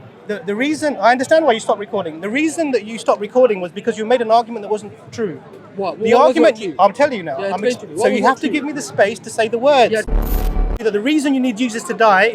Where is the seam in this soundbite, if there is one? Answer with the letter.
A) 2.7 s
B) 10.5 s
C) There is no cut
B